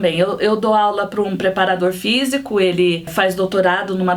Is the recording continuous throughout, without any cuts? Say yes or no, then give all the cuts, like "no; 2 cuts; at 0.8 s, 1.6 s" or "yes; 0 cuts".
no; 1 cut; at 3.1 s